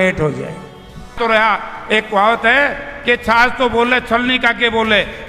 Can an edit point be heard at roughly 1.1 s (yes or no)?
yes